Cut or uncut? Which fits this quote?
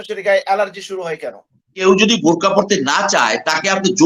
cut